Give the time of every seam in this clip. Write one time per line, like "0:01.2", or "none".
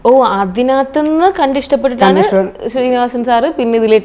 none